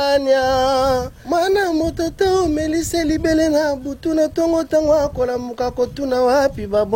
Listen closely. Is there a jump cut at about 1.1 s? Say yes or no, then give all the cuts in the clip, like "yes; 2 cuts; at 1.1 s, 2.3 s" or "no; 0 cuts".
yes; 1 cut; at 1.1 s